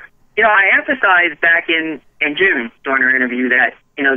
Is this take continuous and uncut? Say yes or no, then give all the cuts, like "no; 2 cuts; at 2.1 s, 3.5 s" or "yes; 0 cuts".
no; 1 cut; at 3.1 s